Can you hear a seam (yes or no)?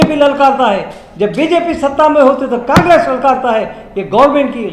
no